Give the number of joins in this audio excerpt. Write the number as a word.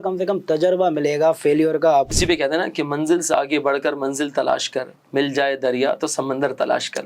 one